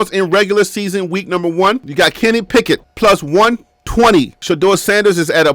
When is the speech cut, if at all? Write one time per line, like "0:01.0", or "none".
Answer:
0:04.4